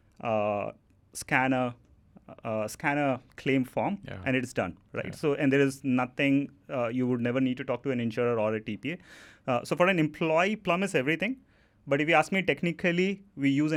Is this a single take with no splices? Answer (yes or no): yes